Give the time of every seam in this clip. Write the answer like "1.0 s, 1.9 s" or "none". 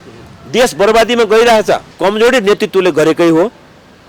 1.9 s